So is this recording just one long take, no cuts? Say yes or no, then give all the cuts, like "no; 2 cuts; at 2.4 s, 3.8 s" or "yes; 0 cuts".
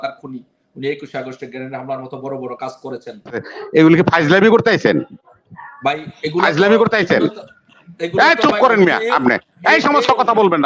no; 1 cut; at 3.5 s